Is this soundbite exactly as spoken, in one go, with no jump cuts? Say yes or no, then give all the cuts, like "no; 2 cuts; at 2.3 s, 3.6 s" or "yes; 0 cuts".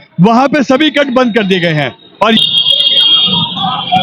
no; 1 cut; at 2.4 s